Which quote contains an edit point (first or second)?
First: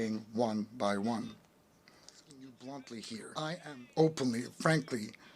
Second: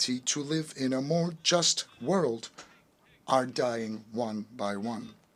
first